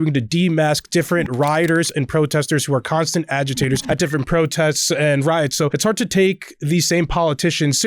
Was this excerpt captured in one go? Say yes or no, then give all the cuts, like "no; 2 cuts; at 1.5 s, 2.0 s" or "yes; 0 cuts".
no; 2 cuts; at 3.8 s, 5.7 s